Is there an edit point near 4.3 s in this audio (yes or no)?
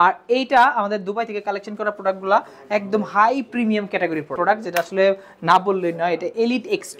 yes